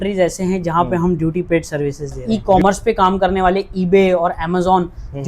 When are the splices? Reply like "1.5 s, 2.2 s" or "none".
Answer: 2.2 s